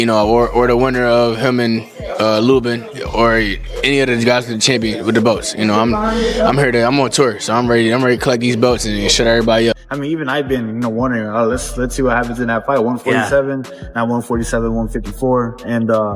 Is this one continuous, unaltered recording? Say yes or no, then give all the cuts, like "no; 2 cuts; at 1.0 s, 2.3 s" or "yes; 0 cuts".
no; 1 cut; at 9.9 s